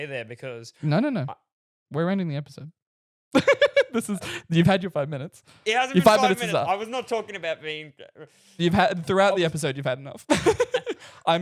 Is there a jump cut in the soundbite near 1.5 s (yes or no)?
no